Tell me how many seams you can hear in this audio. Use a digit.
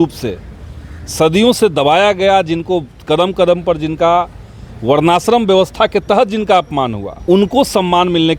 1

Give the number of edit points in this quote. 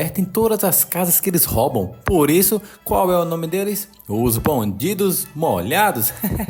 0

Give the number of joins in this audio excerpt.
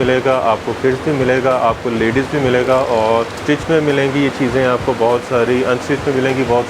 1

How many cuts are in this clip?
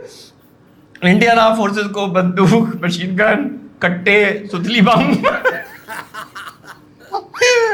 0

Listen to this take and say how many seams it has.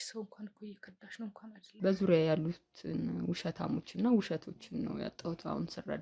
1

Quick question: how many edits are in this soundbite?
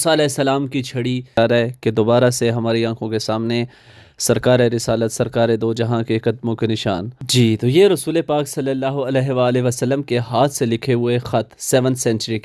2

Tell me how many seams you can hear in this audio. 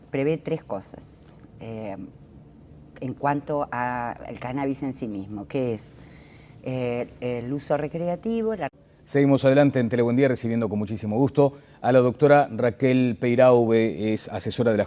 0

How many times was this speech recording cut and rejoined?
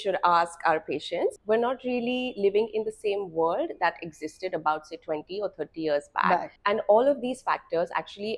2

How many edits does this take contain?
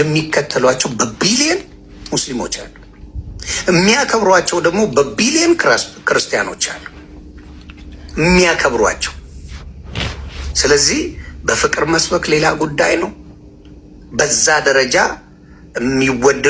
0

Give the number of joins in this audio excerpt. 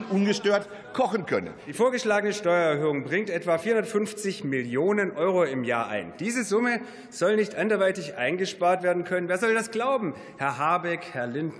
1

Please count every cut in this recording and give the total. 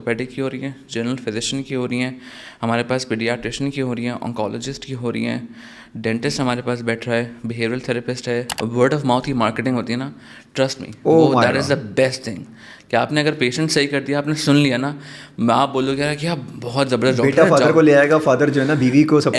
1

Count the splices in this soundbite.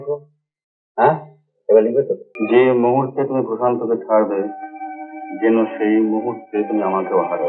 1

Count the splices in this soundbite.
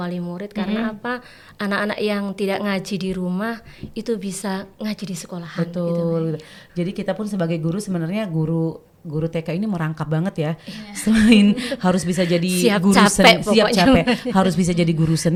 0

